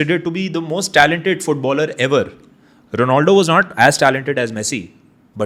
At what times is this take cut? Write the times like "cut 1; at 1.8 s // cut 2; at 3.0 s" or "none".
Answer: none

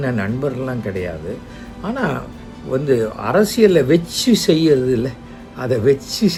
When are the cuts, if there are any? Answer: none

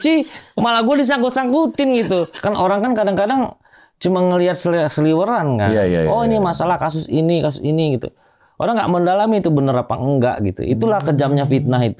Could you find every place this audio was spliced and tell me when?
cut 1; at 2.3 s

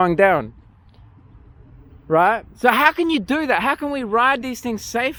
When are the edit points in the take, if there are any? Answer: none

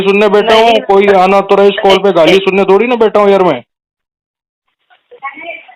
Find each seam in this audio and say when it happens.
none

